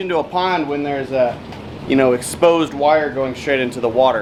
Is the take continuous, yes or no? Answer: yes